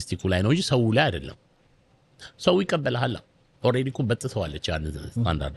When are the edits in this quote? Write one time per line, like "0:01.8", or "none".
none